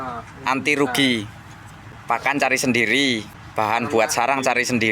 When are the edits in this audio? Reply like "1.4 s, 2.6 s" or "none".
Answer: 1.9 s, 3.4 s